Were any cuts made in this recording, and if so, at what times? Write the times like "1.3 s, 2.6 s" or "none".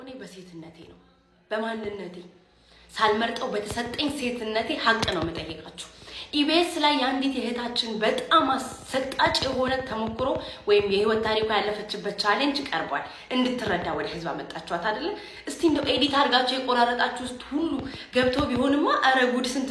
none